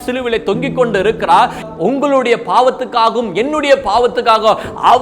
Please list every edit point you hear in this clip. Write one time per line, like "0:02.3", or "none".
none